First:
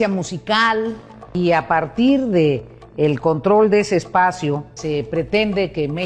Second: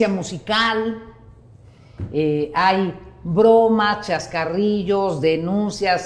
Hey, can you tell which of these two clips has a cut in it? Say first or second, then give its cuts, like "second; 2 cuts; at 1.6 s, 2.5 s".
first; 2 cuts; at 1.3 s, 4.8 s